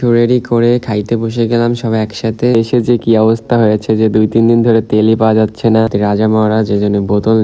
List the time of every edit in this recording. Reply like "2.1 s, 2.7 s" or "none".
2.5 s, 5.9 s